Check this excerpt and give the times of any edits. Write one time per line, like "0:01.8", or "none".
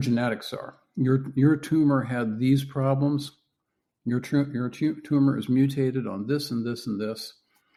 none